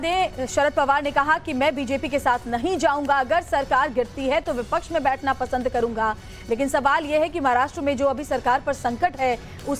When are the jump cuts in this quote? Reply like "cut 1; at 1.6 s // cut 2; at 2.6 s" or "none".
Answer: cut 1; at 1.1 s